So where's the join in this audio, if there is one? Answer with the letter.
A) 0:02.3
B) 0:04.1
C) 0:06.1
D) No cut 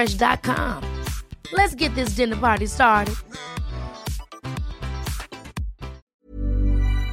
C